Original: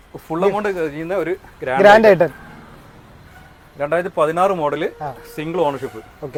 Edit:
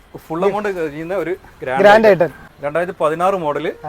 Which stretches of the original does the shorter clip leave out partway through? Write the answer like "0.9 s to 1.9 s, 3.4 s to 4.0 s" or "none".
2.5 s to 3.6 s